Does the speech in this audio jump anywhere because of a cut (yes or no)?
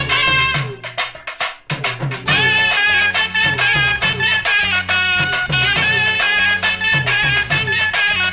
no